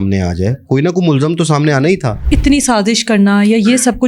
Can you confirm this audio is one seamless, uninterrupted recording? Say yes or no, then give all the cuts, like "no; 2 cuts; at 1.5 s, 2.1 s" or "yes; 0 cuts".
no; 1 cut; at 2.1 s